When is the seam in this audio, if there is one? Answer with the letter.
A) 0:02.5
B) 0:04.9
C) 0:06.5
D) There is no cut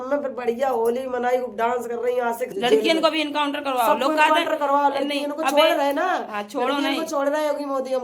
A